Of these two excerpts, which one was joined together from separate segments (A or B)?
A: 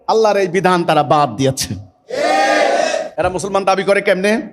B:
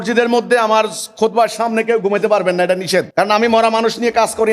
B